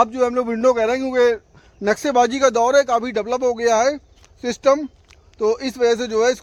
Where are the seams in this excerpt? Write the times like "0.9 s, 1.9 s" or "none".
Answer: none